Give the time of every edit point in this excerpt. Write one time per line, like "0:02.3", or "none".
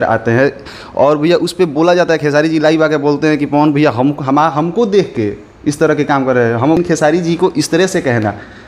0:06.8